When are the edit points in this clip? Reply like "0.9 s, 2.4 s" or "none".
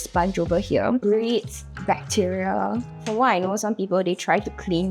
1.0 s, 3.0 s